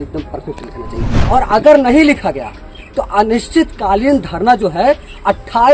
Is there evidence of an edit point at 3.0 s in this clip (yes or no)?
no